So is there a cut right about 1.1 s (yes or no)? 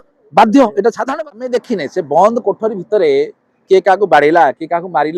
yes